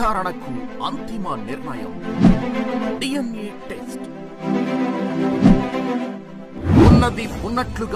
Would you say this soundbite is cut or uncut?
uncut